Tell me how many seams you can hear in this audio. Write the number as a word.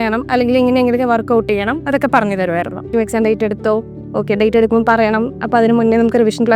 one